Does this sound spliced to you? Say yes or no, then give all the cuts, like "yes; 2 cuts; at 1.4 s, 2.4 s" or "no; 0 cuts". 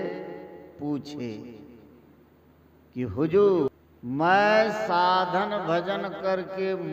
yes; 1 cut; at 3.7 s